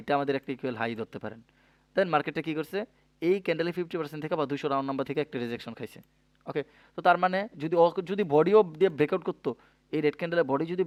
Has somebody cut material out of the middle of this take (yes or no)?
no